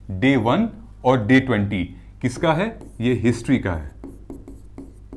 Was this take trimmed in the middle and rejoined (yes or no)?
no